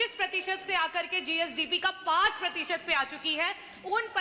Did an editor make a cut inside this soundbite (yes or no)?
no